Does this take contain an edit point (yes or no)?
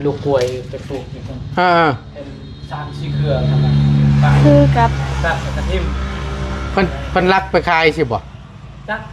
no